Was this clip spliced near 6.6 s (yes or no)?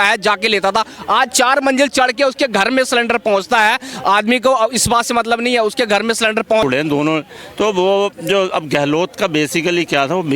yes